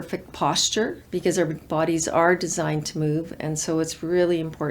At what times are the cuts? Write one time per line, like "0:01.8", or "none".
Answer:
0:01.0

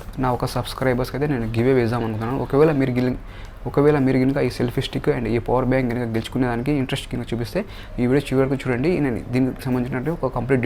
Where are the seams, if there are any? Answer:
none

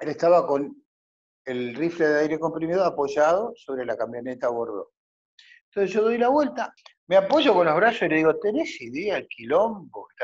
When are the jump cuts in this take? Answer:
0:06.7

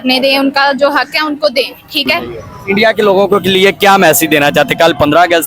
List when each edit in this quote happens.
0:02.3

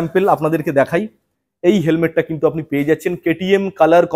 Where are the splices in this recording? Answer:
none

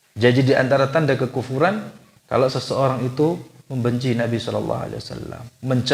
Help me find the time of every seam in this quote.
0:02.1

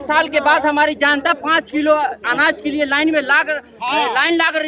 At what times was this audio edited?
none

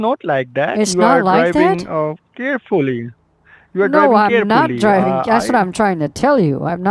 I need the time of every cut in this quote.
none

